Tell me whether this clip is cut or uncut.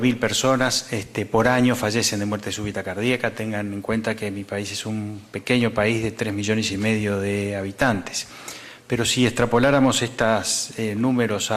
uncut